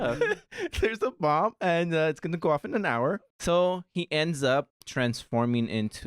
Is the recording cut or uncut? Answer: cut